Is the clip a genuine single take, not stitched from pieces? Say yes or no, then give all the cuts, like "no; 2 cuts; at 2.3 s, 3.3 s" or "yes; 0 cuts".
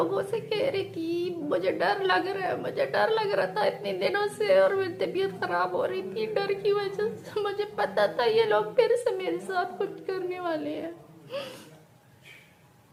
yes; 0 cuts